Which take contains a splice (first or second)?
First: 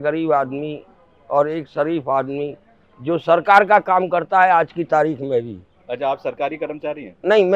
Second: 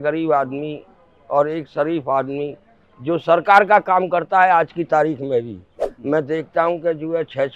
second